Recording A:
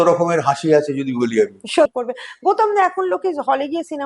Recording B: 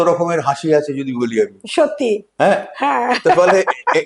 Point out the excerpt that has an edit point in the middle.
A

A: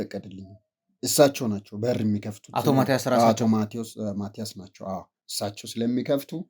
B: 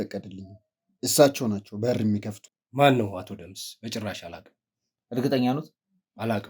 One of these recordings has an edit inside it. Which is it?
B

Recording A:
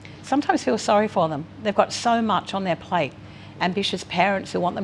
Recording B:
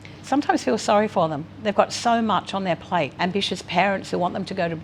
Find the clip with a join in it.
B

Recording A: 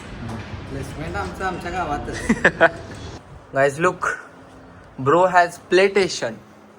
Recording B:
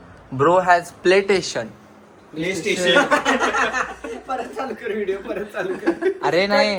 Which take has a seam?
A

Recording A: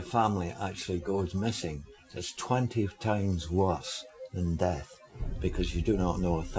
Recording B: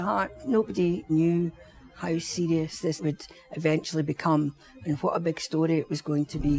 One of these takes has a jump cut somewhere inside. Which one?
B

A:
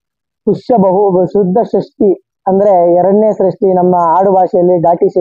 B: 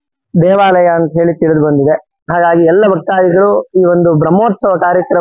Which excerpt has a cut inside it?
B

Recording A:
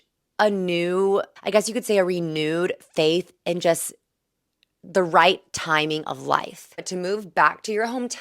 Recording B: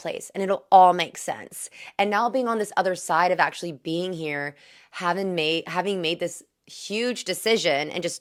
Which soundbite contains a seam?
A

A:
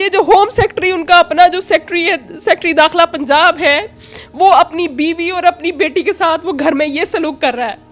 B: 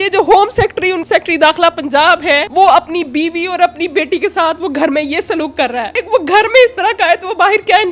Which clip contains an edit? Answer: B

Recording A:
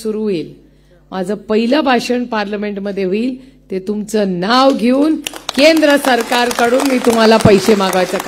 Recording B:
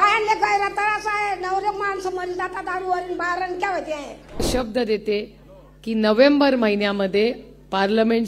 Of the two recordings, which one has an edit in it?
B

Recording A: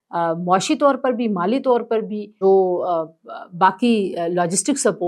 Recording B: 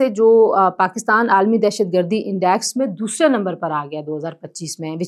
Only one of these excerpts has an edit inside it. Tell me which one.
A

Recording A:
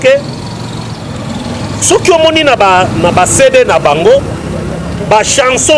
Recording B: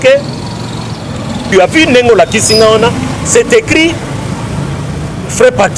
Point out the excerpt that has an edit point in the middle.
B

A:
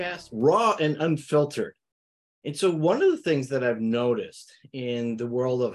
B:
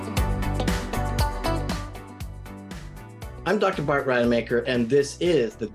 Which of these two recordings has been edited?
B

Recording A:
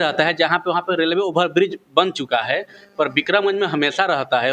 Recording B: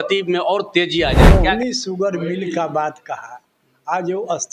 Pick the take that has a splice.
B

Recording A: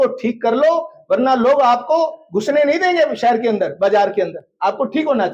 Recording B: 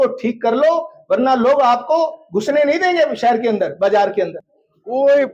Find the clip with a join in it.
B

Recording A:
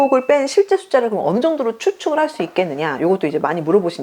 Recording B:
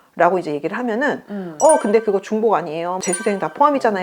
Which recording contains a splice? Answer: B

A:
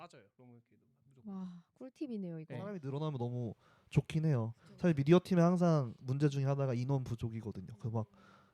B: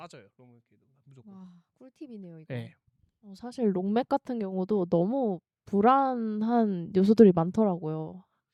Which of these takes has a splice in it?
A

